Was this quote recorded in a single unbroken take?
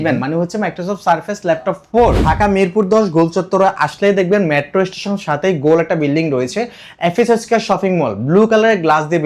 no; 1 cut; at 2.3 s

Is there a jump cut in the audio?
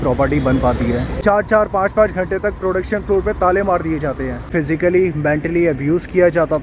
yes; 2 cuts; at 1.1 s, 4.5 s

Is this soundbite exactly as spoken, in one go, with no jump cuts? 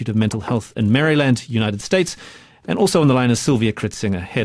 no; 1 cut; at 3.0 s

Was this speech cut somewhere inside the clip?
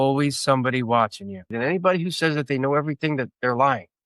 yes; 1 cut; at 1.4 s

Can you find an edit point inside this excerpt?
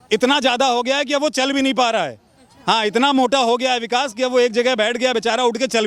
no; 0 cuts

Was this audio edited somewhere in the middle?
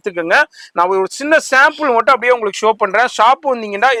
no; 0 cuts

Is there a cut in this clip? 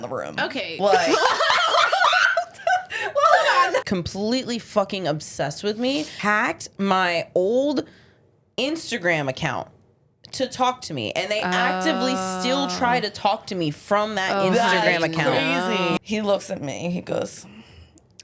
yes; 3 cuts; at 3.8 s, 6.1 s, 16.0 s

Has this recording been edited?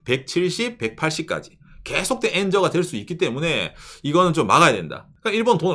no; 0 cuts

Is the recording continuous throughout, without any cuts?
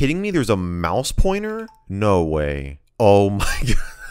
yes; 0 cuts

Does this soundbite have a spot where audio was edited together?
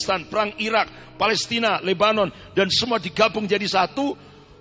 no; 0 cuts

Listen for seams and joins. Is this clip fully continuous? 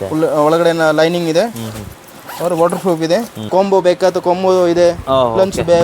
no; 1 cut; at 3.5 s

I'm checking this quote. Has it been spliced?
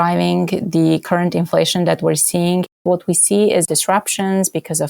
yes; 3 cuts; at 1.0 s, 2.8 s, 3.6 s

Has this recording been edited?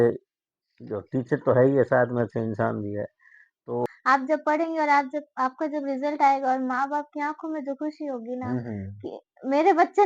yes; 1 cut; at 3.9 s

